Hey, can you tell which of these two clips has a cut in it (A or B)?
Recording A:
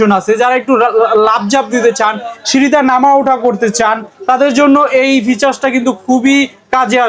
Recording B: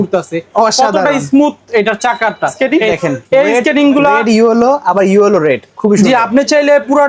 B